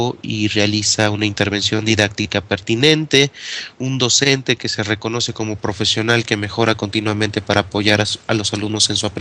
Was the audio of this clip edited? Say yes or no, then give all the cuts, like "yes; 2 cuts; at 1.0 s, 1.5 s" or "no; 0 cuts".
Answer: yes; 1 cut; at 2.2 s